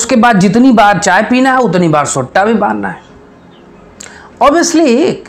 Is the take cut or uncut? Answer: uncut